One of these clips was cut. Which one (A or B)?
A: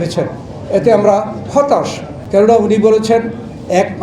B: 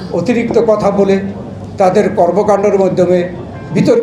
A